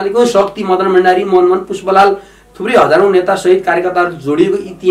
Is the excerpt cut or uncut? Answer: uncut